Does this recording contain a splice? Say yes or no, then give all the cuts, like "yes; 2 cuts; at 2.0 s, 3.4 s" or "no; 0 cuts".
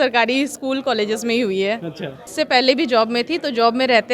yes; 1 cut; at 2.2 s